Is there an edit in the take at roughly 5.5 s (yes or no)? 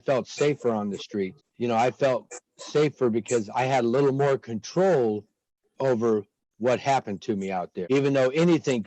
no